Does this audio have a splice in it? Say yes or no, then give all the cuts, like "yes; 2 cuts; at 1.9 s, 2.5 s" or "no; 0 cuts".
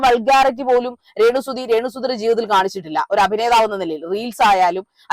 no; 0 cuts